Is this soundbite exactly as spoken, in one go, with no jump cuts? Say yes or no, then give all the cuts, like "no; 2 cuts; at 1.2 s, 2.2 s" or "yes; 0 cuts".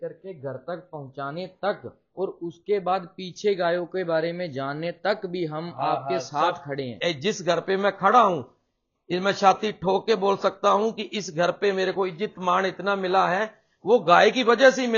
no; 1 cut; at 6.9 s